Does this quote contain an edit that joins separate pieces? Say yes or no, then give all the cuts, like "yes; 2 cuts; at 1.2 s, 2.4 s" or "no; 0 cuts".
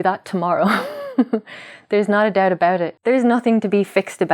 yes; 1 cut; at 2.9 s